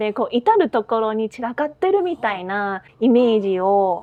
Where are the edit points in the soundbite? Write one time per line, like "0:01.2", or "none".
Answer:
none